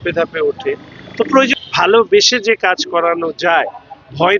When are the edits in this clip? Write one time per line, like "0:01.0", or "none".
0:01.5